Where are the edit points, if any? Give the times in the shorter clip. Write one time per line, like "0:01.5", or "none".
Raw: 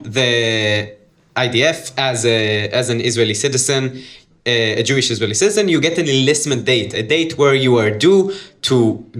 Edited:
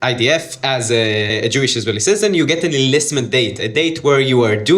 0:01.3